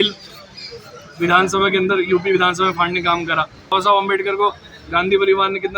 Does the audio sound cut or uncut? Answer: cut